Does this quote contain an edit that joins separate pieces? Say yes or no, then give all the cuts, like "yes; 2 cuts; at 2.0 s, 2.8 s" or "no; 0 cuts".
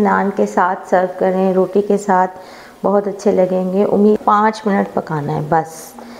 yes; 1 cut; at 4.2 s